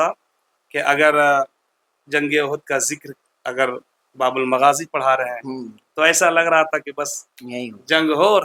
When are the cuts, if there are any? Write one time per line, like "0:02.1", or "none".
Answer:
none